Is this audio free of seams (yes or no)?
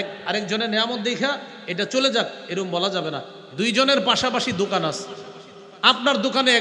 yes